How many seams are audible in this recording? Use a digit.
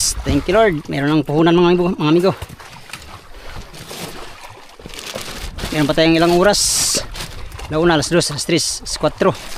0